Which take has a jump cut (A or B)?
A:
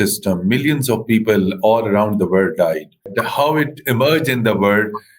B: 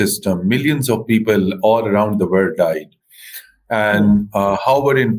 A